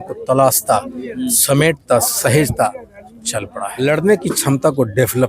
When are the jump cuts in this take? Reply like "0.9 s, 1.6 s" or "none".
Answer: 3.6 s